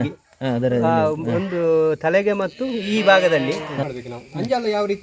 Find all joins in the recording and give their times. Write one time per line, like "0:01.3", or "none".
0:03.9

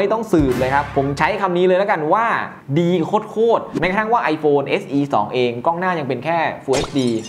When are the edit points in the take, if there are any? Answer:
0:03.8

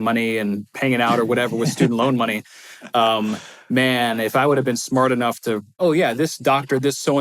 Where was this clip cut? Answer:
0:05.8

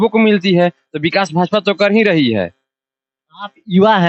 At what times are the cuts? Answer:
none

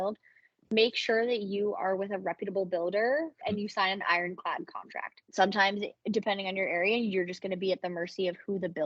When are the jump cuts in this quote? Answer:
0:03.4
0:05.2

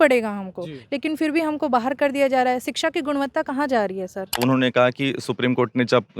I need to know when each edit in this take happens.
0:04.4

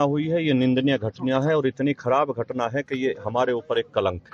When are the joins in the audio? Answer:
0:01.1

